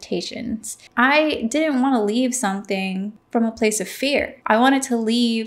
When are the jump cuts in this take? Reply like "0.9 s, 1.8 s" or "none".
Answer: 0.8 s, 3.2 s, 4.3 s